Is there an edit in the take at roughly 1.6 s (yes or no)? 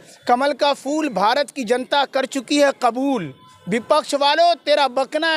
no